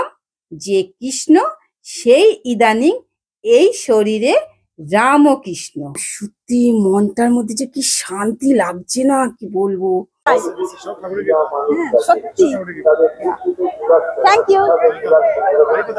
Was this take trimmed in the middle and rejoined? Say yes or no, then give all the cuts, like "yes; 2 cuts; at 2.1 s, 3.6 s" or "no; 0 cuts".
yes; 2 cuts; at 6.1 s, 10.3 s